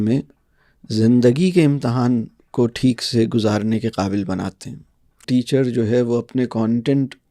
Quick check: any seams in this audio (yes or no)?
yes